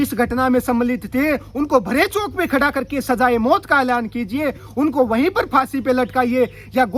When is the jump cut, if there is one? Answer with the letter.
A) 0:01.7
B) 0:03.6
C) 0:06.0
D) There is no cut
D